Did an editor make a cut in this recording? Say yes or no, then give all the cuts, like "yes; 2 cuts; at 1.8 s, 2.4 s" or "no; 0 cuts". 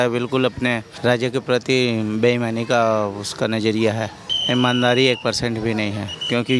yes; 2 cuts; at 0.9 s, 4.3 s